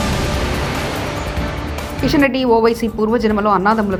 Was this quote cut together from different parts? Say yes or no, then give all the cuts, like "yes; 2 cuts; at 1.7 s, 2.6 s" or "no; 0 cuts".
no; 0 cuts